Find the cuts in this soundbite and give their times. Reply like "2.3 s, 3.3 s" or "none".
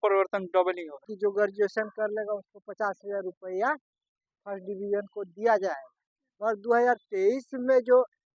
1.0 s